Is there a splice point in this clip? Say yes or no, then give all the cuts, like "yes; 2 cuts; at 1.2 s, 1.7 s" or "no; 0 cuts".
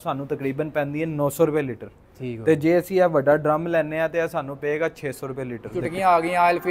yes; 1 cut; at 5.7 s